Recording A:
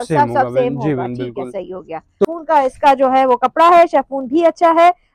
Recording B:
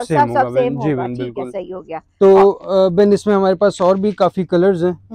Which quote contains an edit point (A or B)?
A